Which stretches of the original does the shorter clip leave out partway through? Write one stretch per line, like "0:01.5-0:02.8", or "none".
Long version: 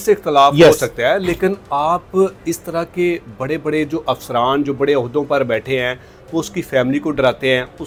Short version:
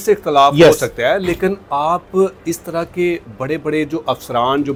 none

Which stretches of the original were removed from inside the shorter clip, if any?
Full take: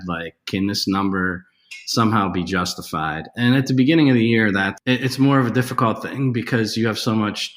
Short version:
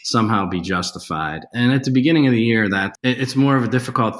none

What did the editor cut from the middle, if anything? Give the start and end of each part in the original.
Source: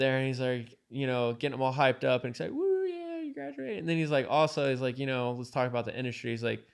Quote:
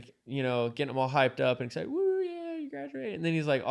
none

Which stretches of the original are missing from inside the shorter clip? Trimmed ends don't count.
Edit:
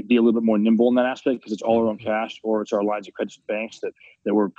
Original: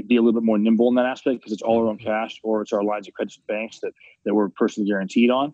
none

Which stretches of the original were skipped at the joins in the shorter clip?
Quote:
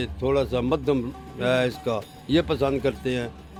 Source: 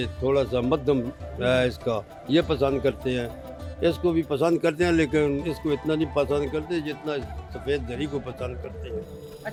none

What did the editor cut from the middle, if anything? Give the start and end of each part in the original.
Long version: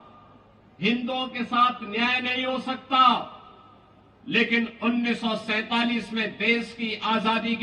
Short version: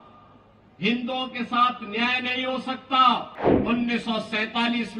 0:03.6-0:04.7

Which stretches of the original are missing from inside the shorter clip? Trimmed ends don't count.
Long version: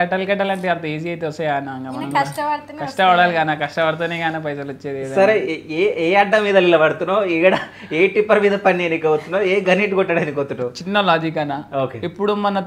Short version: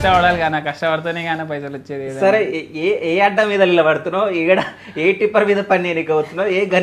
none

